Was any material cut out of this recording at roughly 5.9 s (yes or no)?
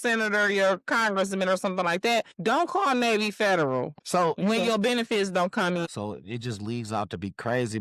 yes